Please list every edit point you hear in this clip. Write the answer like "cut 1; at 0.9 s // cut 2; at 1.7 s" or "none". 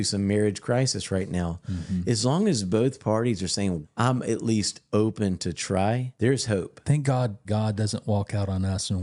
cut 1; at 6.1 s // cut 2; at 7.4 s